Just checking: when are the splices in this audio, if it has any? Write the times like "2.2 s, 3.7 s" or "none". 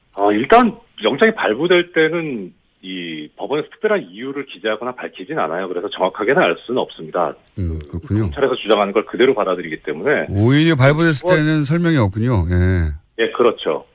none